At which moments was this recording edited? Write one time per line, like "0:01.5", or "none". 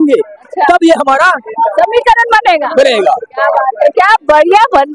none